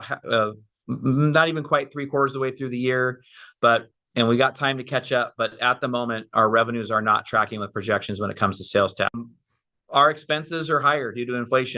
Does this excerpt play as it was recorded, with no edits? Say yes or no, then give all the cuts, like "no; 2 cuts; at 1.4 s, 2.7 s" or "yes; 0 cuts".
no; 1 cut; at 9.2 s